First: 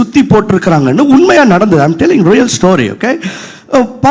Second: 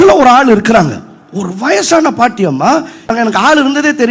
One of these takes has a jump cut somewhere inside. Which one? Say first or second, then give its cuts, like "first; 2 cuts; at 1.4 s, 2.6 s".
second; 1 cut; at 3.1 s